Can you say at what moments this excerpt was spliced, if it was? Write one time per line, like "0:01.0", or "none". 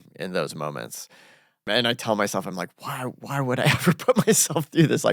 0:01.6